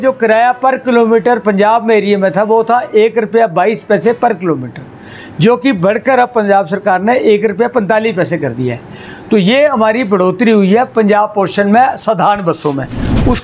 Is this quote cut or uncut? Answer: uncut